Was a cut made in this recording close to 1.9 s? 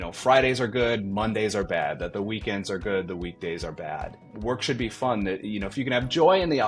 no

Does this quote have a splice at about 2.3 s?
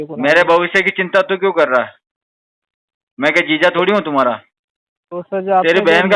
no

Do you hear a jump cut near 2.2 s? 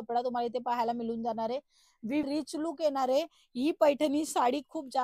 yes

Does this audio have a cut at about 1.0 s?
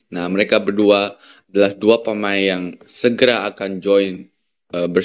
no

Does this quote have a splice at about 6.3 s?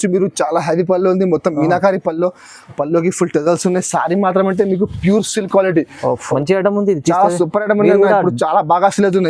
yes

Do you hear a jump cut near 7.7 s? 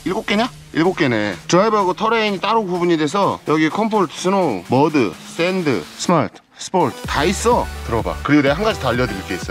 no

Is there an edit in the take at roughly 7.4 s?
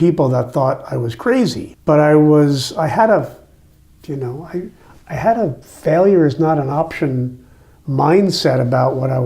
no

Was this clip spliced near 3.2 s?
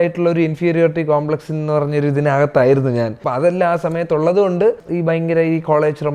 yes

